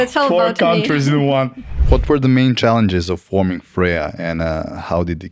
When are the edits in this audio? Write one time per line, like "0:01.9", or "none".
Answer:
0:01.8